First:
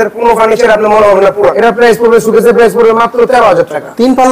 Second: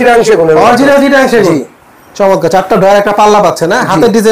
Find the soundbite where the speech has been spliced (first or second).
first